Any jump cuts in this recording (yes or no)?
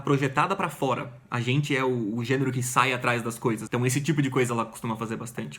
yes